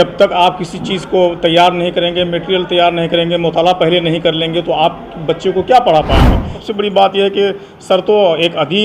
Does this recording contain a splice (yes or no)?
yes